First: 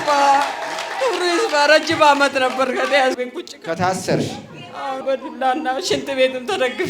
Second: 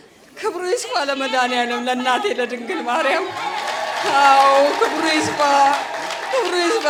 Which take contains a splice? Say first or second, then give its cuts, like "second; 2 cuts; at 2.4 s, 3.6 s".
first; 2 cuts; at 3.2 s, 5.0 s